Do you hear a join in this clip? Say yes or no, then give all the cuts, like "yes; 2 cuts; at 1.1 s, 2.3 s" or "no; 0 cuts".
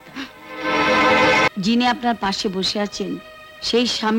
yes; 1 cut; at 1.5 s